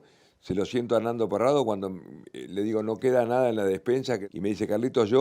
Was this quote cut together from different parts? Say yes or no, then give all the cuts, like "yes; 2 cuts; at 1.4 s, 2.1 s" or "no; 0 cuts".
yes; 1 cut; at 4.2 s